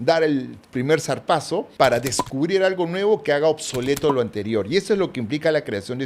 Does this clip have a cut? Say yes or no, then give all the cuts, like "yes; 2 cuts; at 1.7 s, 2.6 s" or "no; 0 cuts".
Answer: yes; 1 cut; at 1.7 s